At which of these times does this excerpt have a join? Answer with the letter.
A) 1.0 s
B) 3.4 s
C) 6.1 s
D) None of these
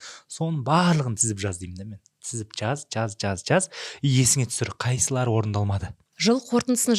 C